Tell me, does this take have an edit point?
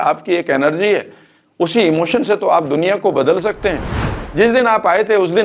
yes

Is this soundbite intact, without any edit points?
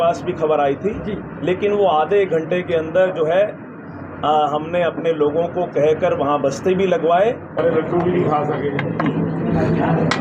no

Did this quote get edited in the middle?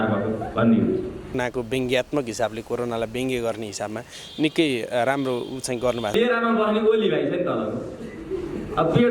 yes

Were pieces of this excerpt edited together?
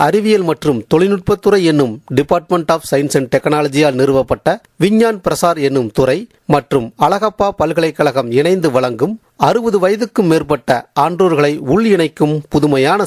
no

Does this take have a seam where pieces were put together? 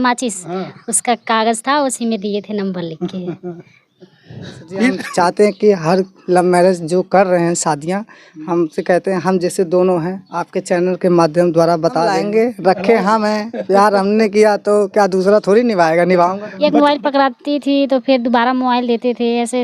yes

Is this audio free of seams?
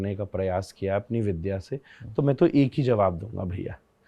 yes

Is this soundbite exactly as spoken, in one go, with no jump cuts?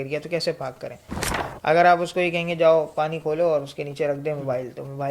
yes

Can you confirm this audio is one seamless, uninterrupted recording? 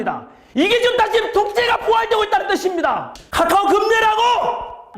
no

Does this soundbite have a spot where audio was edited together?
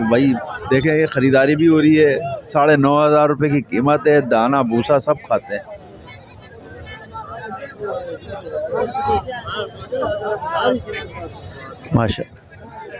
no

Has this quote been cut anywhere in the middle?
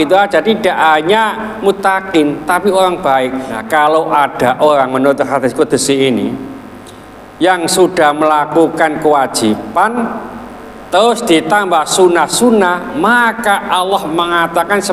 yes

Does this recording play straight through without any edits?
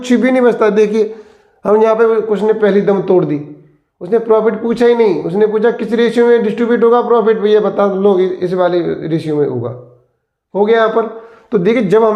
yes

